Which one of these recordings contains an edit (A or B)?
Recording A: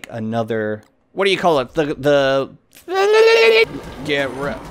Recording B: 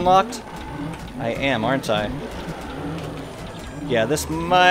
A